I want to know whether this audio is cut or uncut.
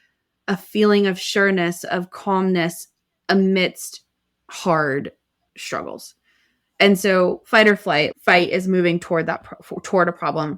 uncut